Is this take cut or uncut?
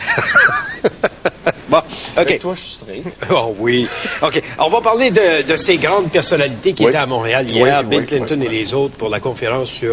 cut